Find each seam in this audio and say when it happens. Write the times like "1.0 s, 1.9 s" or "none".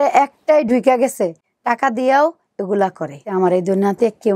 3.3 s